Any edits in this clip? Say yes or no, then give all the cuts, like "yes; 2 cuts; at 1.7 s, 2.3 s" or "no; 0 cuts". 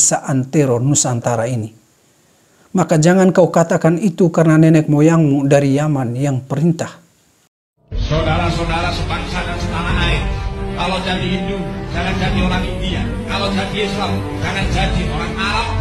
no; 0 cuts